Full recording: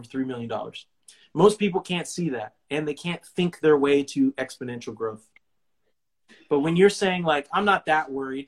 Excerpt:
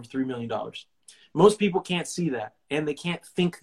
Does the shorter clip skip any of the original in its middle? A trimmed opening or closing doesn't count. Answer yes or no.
no